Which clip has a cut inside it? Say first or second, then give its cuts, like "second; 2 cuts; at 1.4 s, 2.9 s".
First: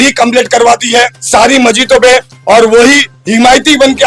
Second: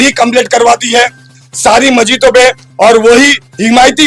first; 1 cut; at 1.2 s